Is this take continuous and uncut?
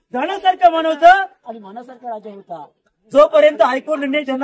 no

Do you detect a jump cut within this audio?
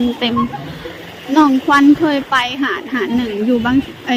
no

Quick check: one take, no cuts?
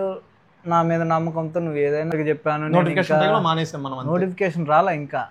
no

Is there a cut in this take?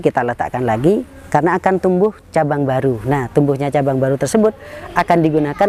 no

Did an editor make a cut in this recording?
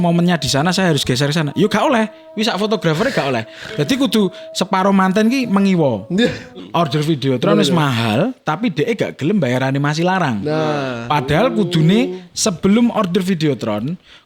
yes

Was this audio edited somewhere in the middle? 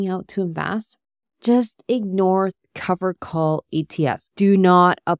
yes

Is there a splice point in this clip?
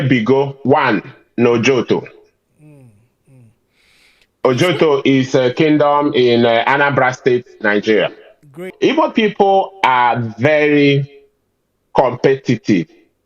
yes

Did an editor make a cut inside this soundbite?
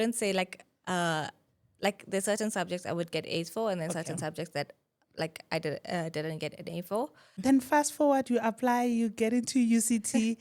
yes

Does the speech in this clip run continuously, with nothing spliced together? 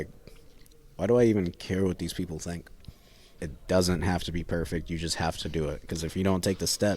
no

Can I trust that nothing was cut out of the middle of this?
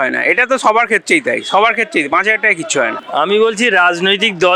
no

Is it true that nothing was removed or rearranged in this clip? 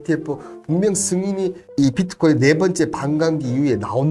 yes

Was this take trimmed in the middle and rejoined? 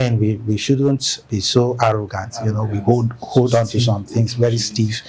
no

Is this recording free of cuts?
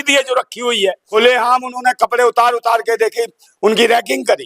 no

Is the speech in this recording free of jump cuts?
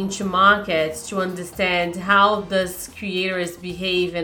yes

